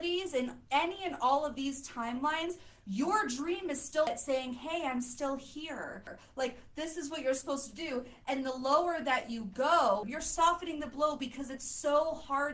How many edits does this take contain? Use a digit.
3